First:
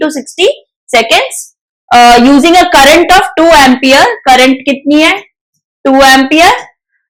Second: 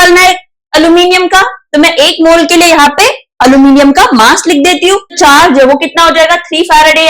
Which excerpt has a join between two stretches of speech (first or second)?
second